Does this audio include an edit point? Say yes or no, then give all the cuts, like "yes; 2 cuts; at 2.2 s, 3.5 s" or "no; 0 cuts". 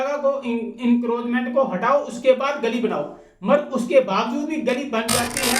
no; 0 cuts